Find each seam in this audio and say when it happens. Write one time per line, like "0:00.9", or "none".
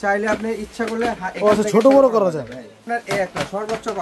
0:02.8